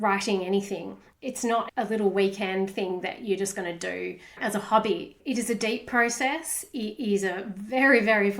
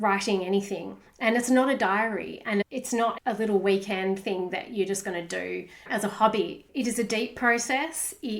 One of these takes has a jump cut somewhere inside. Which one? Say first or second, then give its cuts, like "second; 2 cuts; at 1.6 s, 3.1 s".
first; 1 cut; at 1.2 s